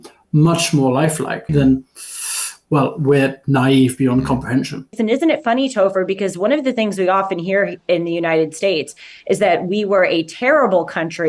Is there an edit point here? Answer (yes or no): yes